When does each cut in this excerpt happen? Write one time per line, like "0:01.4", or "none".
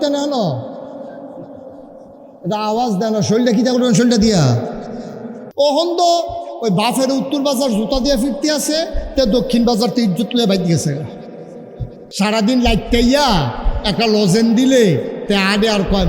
0:05.4
0:12.1